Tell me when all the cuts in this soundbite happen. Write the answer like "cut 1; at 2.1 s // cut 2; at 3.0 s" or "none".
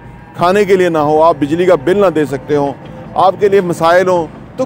none